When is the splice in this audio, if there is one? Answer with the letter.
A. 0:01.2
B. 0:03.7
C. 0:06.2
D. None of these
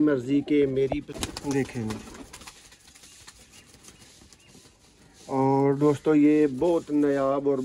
A